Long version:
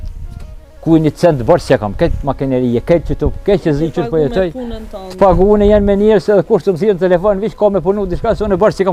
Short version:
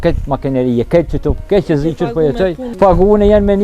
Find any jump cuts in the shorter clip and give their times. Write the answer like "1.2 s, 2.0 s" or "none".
2.6 s